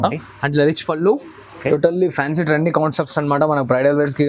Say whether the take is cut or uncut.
cut